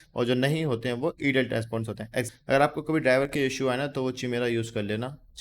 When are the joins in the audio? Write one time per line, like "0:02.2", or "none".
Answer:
0:02.3